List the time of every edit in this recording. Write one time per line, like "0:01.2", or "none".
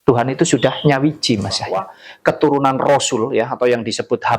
0:02.1